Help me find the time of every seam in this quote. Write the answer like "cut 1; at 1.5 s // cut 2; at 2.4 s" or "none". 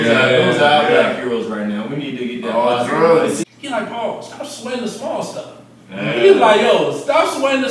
cut 1; at 3.4 s